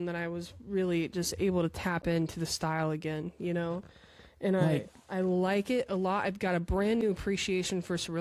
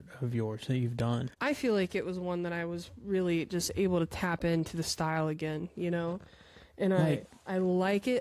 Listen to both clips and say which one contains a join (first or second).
second